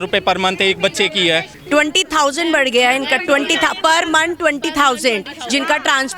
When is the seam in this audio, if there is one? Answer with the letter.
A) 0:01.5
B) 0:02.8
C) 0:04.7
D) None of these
A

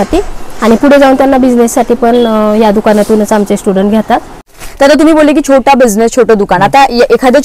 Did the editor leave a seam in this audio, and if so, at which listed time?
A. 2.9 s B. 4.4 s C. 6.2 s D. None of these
B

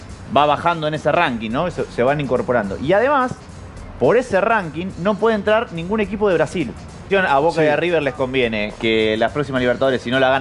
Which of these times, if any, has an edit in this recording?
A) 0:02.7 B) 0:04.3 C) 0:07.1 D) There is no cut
C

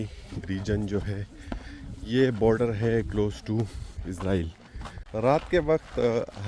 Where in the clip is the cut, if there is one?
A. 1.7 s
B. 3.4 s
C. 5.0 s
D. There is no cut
C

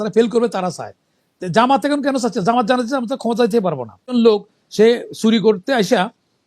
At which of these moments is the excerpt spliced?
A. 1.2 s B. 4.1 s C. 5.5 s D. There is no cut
B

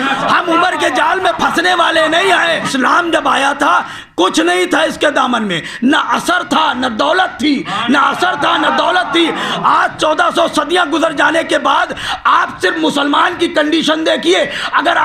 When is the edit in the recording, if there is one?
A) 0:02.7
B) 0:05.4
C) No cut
A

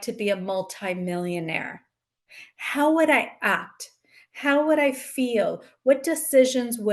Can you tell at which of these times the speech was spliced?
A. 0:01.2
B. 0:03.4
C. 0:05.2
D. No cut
D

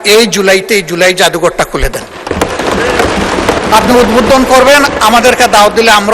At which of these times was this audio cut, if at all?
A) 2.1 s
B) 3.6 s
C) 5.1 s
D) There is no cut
B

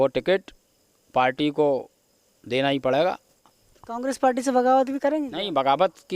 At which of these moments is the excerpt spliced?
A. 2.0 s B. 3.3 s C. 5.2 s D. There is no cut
B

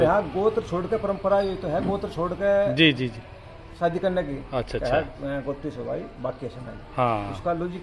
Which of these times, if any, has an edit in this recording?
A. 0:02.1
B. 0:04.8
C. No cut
C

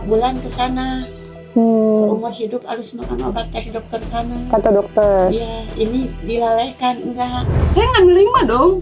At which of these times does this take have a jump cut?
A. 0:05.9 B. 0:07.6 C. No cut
B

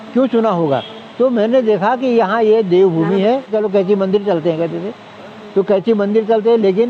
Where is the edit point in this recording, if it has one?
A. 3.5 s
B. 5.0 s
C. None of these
A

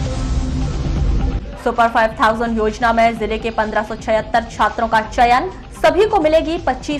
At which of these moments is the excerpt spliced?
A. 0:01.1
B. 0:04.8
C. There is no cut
A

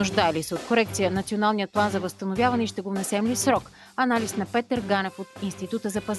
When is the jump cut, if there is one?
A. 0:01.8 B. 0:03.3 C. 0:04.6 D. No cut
D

